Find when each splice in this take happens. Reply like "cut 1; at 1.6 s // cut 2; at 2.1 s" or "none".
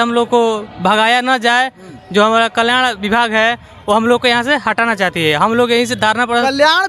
none